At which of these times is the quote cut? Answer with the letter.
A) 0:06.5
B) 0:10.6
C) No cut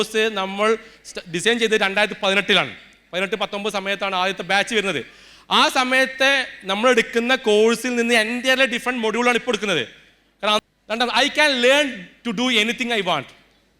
B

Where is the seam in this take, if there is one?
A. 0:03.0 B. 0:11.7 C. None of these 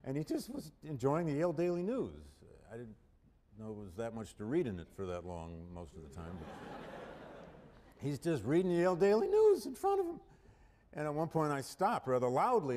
B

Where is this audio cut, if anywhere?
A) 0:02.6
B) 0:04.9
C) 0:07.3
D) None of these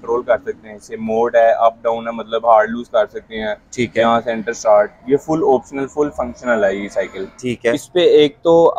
C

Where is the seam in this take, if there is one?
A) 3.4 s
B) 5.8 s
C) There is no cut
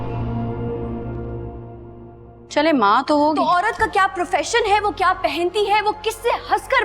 A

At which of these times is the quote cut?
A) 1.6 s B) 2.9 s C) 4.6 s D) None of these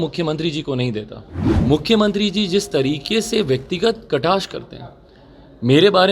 A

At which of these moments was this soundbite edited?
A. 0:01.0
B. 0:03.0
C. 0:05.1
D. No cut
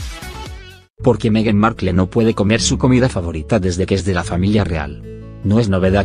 D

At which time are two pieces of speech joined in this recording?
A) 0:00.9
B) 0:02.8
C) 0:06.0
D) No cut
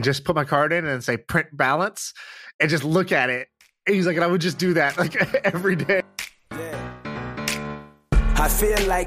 C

